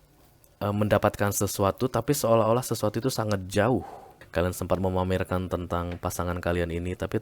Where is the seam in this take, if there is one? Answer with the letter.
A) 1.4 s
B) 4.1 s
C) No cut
B